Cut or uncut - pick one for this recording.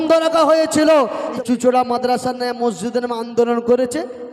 cut